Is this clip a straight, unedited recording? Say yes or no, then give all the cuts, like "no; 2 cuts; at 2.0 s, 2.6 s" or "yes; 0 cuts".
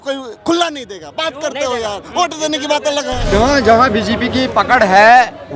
no; 1 cut; at 3.3 s